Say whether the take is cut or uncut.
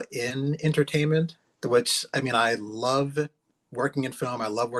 uncut